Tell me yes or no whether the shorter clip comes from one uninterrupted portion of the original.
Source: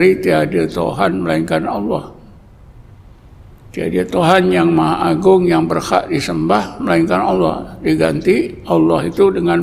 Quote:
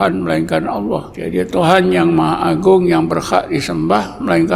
no